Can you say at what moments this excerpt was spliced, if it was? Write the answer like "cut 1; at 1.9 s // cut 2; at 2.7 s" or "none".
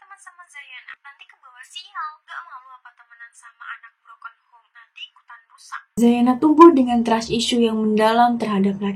cut 1; at 5.8 s